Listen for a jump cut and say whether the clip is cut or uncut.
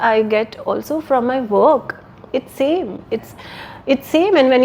uncut